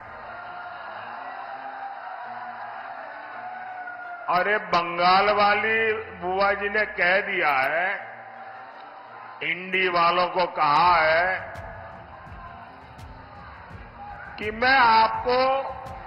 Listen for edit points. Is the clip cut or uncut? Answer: uncut